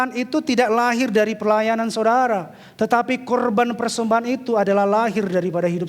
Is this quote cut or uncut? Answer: uncut